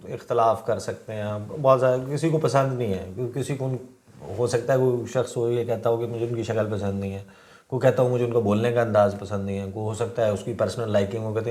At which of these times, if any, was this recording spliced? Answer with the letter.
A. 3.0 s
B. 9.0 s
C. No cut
C